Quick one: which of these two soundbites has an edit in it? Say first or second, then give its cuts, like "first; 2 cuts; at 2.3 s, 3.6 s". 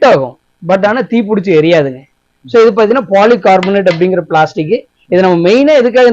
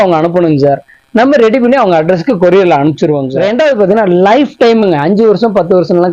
second; 1 cut; at 3.3 s